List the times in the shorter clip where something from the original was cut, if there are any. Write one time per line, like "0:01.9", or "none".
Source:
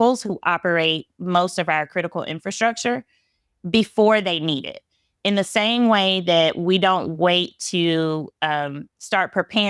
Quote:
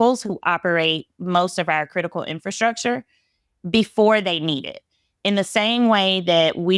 none